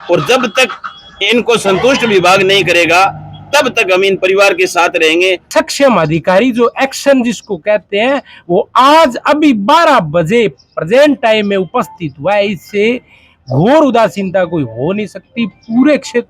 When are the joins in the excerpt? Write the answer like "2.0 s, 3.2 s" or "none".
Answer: 5.5 s